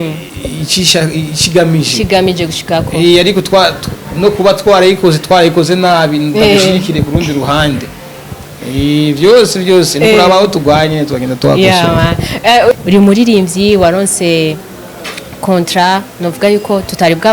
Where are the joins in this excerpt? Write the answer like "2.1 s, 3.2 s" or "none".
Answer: 12.7 s